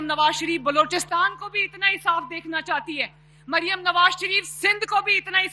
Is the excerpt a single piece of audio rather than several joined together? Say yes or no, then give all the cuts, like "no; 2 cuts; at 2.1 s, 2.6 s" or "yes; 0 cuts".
yes; 0 cuts